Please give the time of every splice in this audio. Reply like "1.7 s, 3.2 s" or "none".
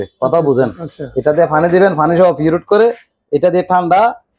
none